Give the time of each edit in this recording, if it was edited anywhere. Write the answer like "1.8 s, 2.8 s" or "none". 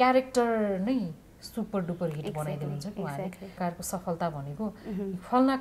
3.6 s

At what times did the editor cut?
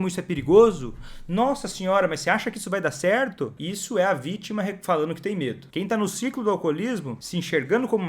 3.6 s, 5.6 s, 7.2 s

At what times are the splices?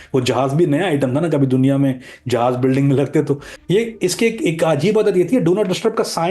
3.5 s

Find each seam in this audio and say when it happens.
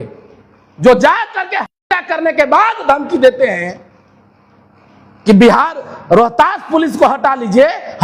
none

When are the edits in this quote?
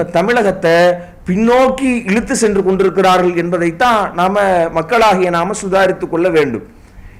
none

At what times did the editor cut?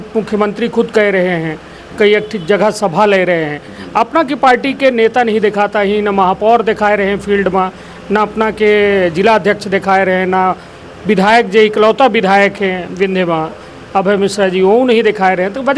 none

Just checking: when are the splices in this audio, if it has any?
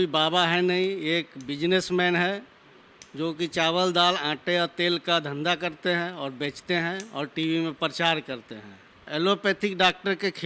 9.0 s

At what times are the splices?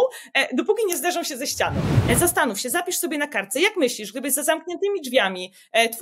1.9 s

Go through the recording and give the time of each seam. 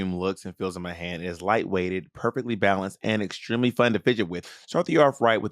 4.4 s

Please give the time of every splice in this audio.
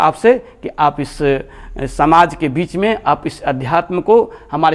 none

